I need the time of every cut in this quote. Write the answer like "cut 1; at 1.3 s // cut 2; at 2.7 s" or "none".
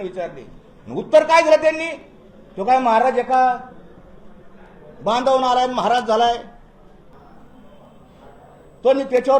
cut 1; at 7.1 s